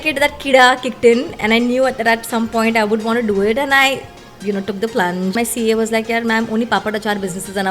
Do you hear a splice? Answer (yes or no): yes